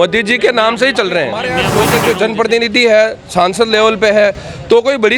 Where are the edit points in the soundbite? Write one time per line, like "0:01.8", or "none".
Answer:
0:01.7